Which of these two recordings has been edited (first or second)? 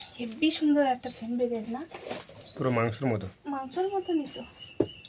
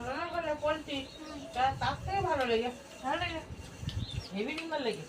second